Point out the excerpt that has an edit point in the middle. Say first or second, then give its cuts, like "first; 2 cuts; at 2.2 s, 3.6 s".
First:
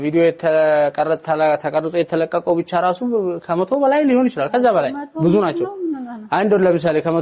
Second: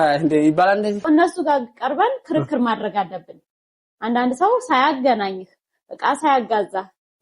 second; 1 cut; at 1.1 s